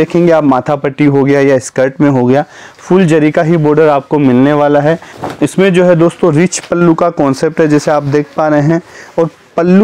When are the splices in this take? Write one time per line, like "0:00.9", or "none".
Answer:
0:05.1